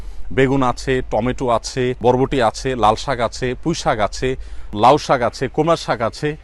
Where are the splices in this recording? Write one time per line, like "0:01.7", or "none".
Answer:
0:02.0
0:04.7

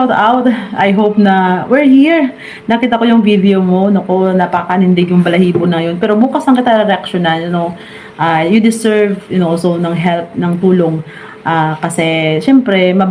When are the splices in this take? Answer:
none

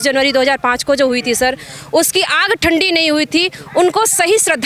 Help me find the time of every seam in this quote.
none

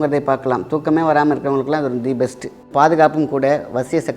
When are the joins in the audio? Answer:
0:02.7

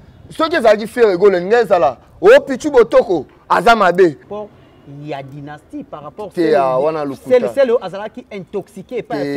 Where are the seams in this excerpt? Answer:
0:04.2

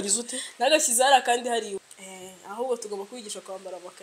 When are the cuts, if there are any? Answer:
0:01.8

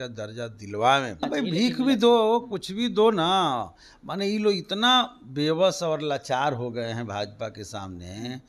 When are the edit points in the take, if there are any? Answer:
0:01.2

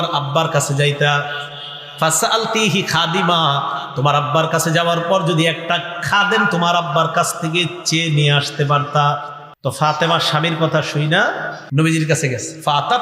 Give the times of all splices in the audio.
0:09.8
0:11.5

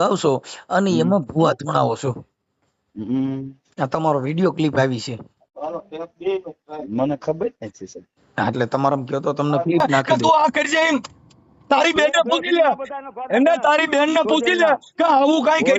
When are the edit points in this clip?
0:10.0

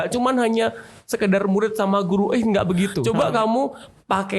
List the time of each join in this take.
0:03.0

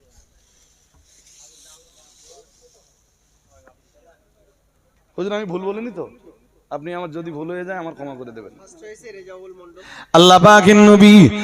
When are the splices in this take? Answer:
0:09.9

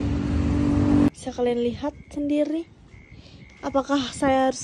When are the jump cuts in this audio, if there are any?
0:01.2

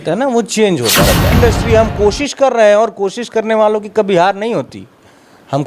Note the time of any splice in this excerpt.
0:01.3

